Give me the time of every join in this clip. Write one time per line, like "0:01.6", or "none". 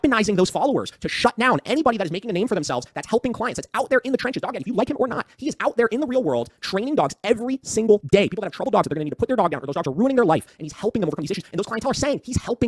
none

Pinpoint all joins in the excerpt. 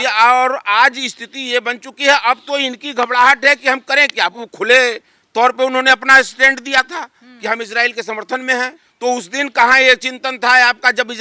0:04.3
0:08.8

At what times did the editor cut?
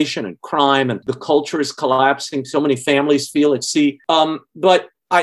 0:01.1

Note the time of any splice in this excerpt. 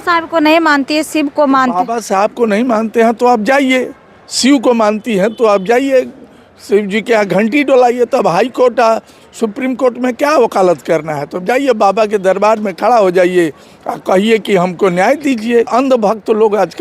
0:15.7

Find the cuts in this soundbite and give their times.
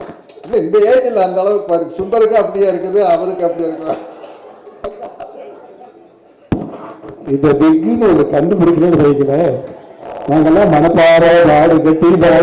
none

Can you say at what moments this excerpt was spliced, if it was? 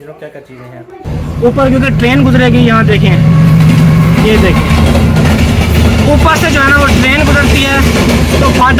0:01.2

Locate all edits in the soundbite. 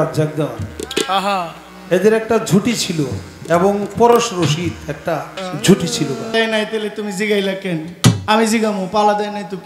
0:05.4
0:06.3
0:08.2

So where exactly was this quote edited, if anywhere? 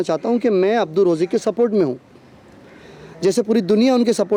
none

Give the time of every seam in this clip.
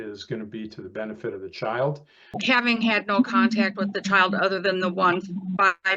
0:02.3

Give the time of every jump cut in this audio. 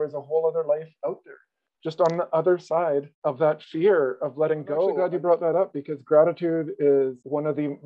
0:03.1
0:05.0

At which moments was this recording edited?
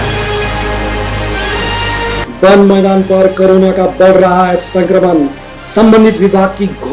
0:01.7

